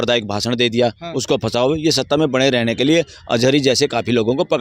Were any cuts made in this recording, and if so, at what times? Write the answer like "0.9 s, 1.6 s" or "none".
none

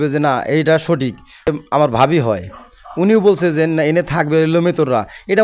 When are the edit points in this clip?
1.5 s

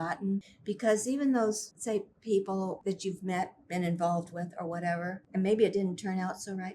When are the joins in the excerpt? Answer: 1.7 s, 2.8 s, 5.2 s

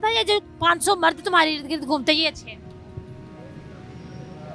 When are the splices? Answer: none

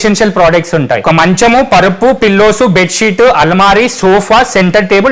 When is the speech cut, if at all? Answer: 1.0 s

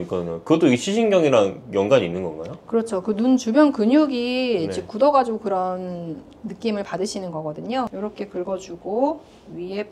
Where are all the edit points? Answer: 7.9 s

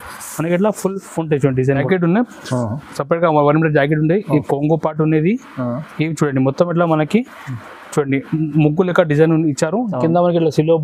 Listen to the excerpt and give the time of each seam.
1.8 s

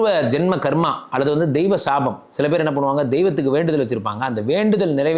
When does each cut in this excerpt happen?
none

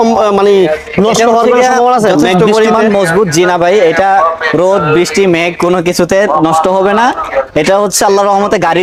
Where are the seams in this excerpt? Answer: none

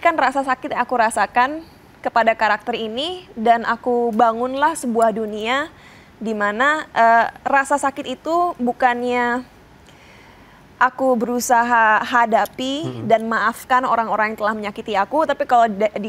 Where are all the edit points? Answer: none

